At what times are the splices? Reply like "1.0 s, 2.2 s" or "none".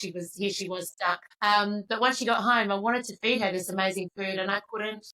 1.3 s